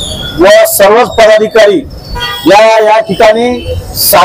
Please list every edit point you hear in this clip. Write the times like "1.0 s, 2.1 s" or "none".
2.3 s